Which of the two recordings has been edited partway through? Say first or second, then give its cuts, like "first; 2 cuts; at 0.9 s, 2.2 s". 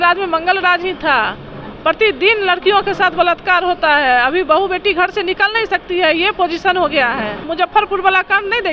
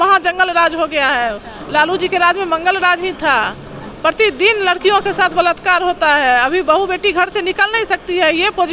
first; 1 cut; at 7.5 s